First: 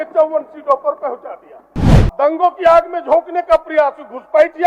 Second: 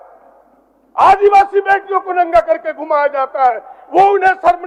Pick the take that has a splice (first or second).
first